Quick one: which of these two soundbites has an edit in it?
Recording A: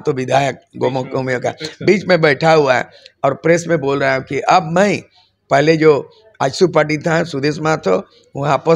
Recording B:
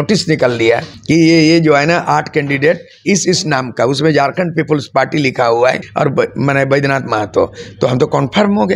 B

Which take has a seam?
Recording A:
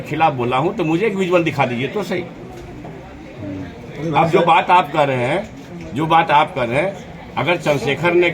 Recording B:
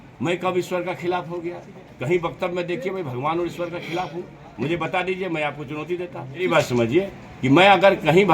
B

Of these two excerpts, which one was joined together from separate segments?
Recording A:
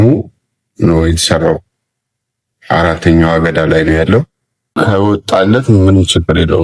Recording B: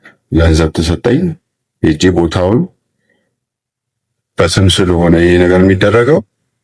A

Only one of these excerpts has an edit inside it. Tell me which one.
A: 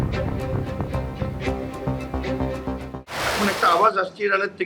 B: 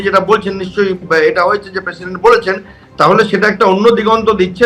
A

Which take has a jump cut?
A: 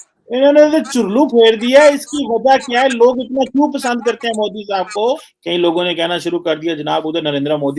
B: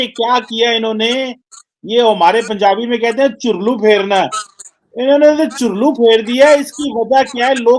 A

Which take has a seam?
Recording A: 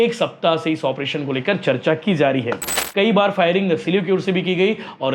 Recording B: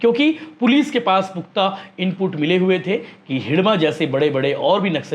A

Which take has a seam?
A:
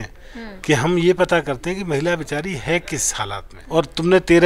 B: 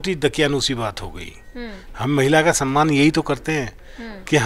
A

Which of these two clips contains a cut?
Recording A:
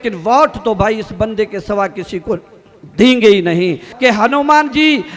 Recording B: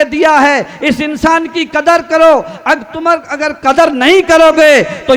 A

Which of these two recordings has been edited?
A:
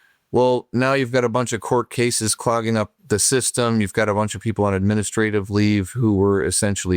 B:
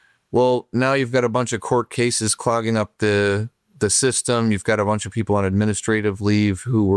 A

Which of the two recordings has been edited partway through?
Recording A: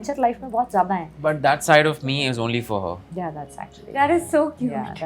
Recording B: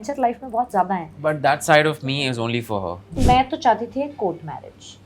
B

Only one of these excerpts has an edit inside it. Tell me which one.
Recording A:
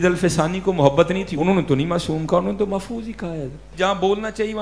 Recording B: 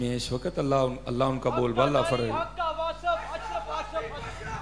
A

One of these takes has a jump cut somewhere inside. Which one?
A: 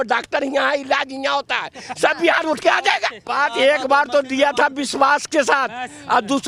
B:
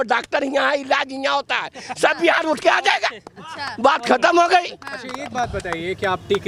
A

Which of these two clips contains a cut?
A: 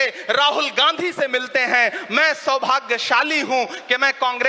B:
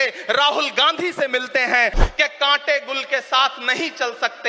B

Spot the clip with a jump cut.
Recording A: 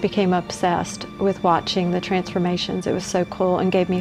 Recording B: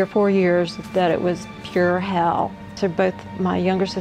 B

